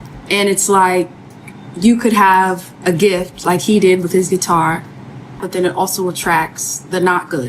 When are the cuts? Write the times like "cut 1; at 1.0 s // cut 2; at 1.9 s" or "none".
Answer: cut 1; at 5.4 s